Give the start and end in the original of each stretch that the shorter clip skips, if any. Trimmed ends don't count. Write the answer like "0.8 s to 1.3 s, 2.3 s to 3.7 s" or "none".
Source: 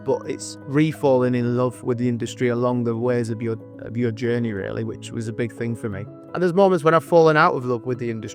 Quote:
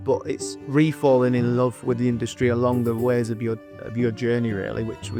none